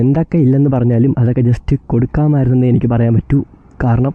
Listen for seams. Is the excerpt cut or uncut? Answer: uncut